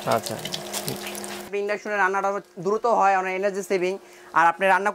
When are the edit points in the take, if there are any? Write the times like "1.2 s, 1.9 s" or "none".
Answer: 1.5 s